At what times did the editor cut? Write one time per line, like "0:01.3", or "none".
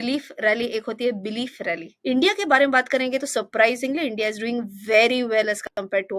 0:01.9